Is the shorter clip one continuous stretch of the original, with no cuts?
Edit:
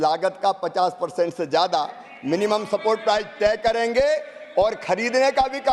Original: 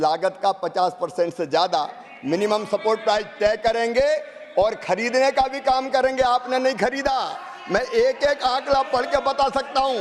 yes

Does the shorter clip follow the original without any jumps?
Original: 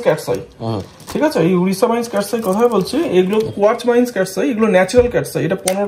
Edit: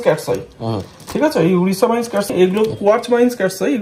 no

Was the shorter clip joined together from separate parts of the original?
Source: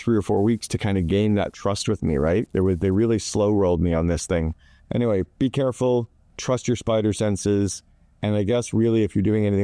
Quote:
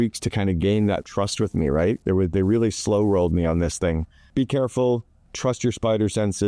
yes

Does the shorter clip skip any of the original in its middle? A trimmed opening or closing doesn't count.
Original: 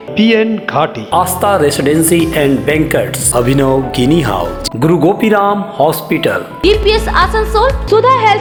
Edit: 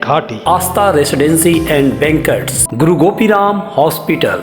yes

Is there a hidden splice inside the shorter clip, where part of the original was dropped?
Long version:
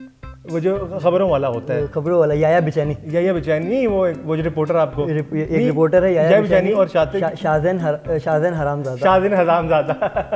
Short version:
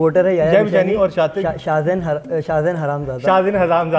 no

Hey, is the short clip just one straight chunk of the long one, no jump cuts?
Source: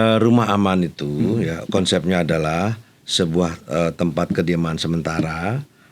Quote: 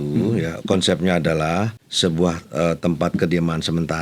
no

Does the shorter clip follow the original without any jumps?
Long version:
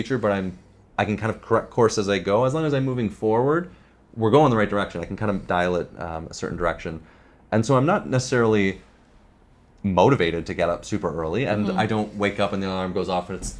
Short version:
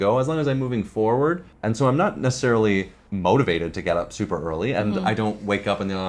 no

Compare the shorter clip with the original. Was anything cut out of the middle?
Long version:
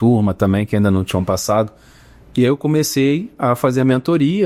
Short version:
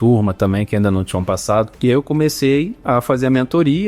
yes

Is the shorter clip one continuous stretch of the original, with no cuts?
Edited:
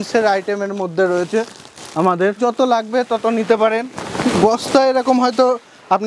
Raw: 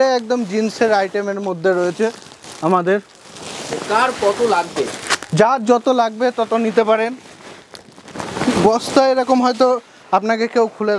no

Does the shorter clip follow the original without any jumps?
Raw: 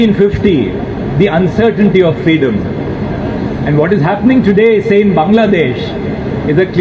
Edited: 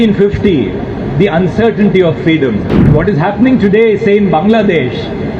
no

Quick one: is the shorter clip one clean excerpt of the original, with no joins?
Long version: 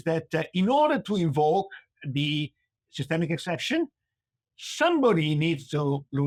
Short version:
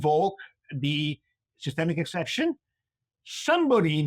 yes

